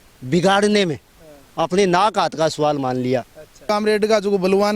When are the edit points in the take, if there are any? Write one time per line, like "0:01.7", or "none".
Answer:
0:03.7